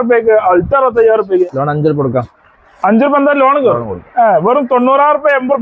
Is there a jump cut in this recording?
yes; 1 cut; at 1.4 s

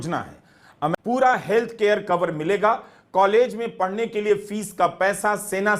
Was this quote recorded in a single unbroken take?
no; 1 cut; at 0.9 s

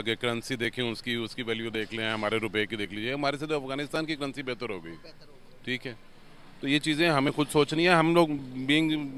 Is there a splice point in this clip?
no; 0 cuts

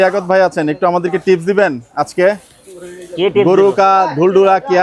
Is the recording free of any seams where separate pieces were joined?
yes; 0 cuts

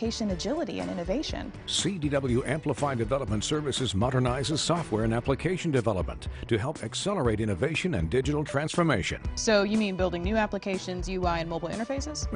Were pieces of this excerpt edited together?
no; 0 cuts

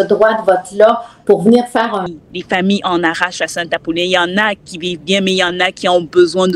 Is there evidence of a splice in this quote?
yes; 1 cut; at 2.0 s

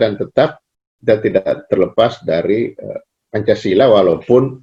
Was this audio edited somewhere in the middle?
no; 0 cuts

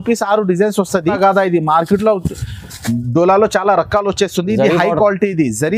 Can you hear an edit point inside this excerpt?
yes; 1 cut; at 1.2 s

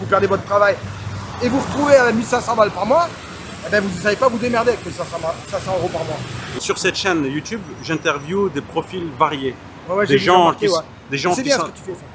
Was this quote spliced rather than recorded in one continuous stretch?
no; 0 cuts

